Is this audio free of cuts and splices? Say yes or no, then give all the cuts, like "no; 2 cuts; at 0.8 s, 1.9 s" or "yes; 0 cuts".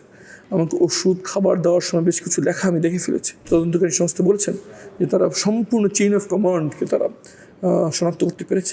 no; 1 cut; at 3.4 s